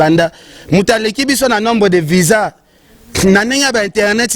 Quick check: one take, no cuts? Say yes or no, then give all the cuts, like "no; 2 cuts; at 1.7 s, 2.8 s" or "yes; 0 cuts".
yes; 0 cuts